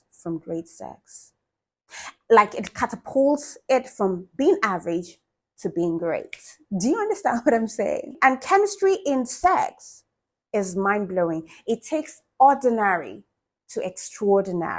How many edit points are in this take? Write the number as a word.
one